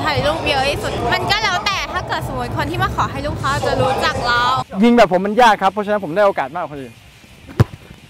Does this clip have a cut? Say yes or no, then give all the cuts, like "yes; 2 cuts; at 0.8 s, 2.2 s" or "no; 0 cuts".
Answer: yes; 3 cuts; at 1.0 s, 4.6 s, 7.0 s